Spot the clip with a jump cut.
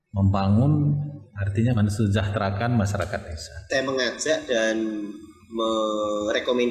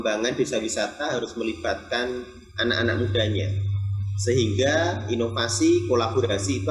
first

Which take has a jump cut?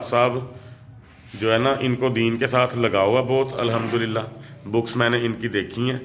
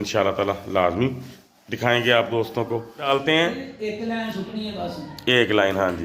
second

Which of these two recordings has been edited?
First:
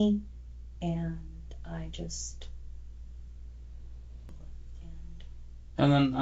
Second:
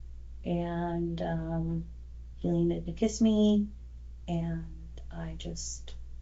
first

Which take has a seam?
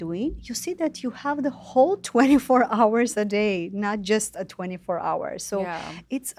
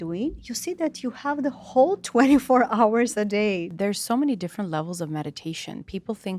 second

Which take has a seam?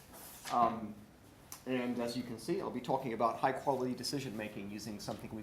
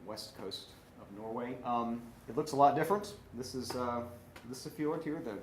second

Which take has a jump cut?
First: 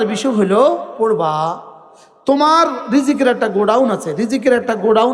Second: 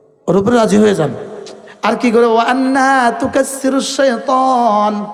first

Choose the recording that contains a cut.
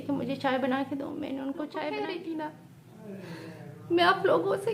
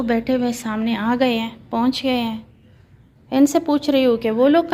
first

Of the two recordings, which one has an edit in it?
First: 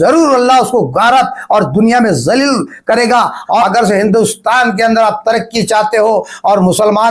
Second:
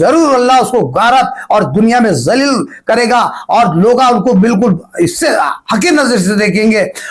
first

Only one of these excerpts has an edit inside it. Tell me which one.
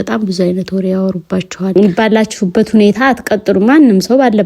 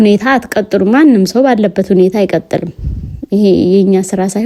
first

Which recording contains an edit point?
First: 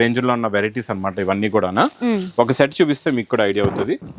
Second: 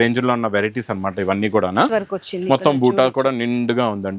second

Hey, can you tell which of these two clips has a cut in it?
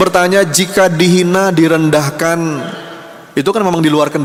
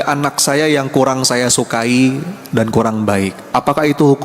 second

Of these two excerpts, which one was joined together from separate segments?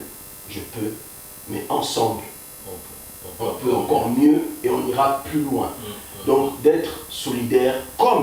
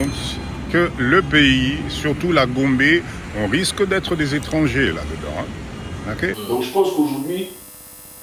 second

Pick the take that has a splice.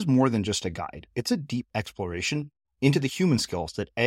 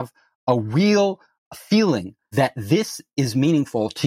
second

